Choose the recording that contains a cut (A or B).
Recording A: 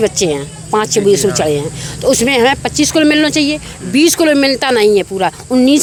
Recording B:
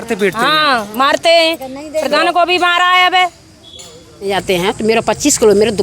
B